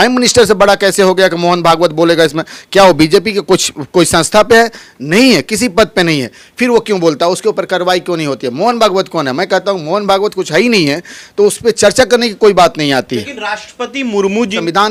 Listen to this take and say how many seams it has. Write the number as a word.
zero